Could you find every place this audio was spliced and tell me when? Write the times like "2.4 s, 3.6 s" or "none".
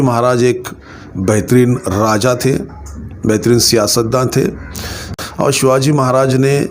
5.0 s

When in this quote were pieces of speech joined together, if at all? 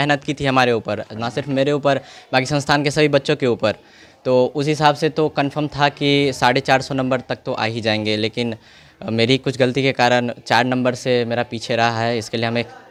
none

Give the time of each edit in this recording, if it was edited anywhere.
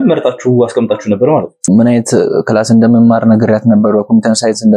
1.5 s

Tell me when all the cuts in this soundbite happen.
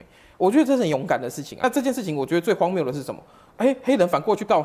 1.5 s

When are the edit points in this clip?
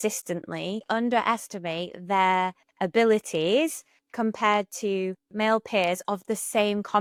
none

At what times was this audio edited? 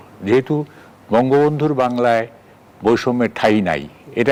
none

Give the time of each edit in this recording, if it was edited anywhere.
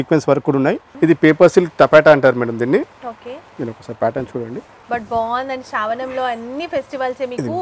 0.9 s, 4.7 s

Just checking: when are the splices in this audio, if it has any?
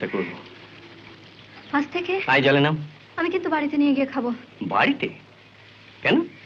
2.2 s

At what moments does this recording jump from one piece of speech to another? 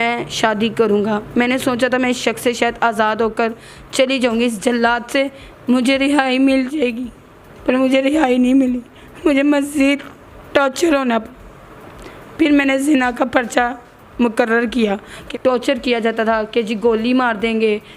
15.2 s

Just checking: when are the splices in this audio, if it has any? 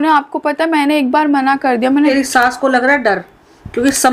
2.1 s

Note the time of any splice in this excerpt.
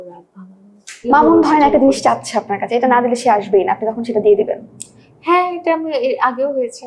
1.0 s

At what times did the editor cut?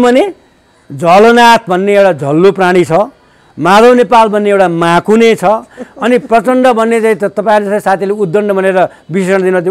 none

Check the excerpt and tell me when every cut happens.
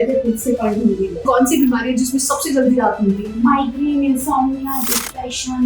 1.2 s

